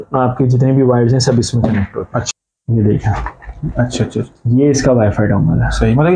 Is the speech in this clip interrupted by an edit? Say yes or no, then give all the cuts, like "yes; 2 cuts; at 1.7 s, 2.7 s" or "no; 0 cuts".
yes; 1 cut; at 2.2 s